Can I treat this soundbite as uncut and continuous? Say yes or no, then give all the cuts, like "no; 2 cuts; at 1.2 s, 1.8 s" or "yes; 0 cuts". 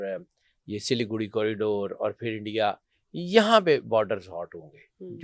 yes; 0 cuts